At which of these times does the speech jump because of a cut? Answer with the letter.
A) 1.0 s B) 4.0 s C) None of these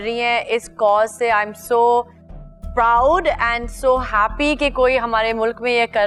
C